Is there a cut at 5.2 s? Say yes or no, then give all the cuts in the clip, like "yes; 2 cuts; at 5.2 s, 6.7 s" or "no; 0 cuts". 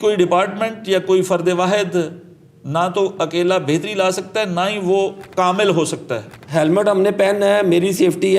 yes; 2 cuts; at 5.2 s, 6.4 s